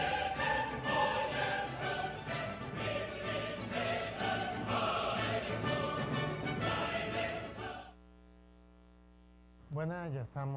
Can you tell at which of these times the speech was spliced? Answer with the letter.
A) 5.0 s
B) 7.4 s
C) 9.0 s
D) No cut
D